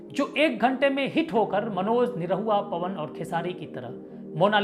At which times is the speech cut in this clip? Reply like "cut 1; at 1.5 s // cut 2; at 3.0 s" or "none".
none